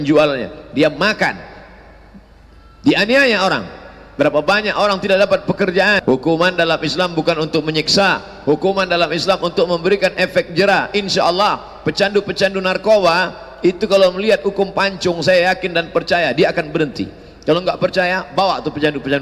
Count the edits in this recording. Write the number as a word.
one